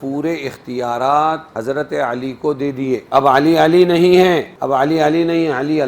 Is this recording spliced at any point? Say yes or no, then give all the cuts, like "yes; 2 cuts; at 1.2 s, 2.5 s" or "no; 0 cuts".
yes; 3 cuts; at 1.5 s, 3.0 s, 4.5 s